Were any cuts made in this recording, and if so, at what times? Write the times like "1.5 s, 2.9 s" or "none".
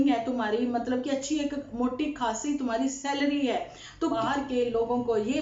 4.2 s